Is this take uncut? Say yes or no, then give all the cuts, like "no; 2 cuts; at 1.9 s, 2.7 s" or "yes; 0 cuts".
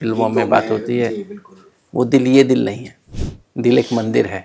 no; 1 cut; at 2.9 s